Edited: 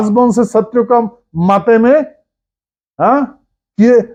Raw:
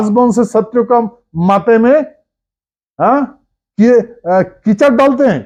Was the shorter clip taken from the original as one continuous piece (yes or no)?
yes